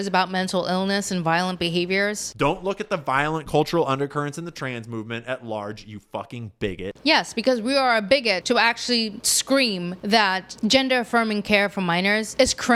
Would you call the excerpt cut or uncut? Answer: uncut